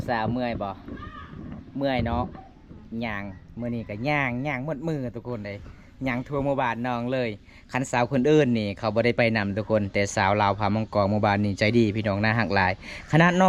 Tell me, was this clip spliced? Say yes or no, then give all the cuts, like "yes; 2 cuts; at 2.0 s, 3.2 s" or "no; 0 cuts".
no; 0 cuts